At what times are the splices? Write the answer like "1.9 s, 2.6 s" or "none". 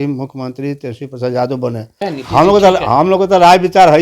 2.0 s